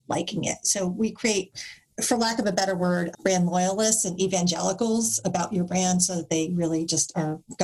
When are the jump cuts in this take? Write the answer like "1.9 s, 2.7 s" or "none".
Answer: 3.1 s